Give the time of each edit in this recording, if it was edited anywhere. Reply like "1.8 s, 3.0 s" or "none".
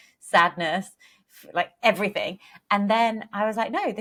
none